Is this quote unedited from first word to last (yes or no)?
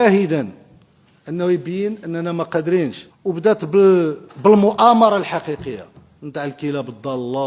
no